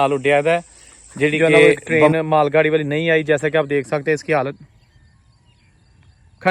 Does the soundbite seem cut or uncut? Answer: cut